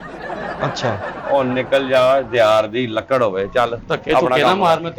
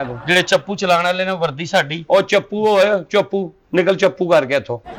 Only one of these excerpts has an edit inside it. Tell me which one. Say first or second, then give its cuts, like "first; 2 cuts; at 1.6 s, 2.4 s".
first; 1 cut; at 1.1 s